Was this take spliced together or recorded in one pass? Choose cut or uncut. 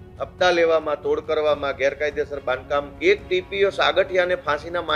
cut